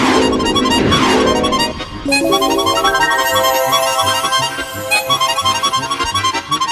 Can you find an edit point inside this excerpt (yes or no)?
no